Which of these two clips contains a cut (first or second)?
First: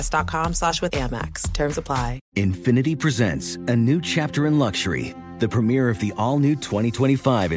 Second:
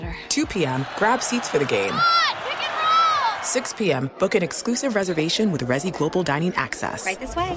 first